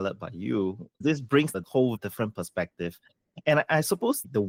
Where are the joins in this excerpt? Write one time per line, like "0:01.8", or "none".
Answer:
none